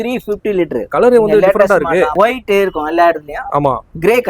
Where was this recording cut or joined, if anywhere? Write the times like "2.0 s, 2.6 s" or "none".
0.9 s, 2.1 s